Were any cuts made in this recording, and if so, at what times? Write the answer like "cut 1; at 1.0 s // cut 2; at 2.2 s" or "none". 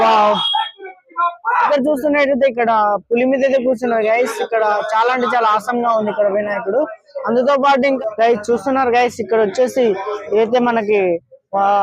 cut 1; at 1.7 s // cut 2; at 8.0 s